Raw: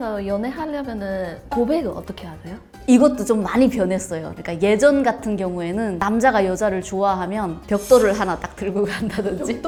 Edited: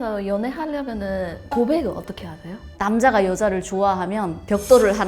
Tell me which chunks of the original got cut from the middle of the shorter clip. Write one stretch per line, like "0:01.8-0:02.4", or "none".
0:02.7-0:05.9